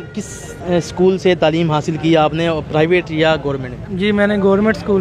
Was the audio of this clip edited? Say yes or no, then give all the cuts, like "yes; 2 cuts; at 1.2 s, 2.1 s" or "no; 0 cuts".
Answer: no; 0 cuts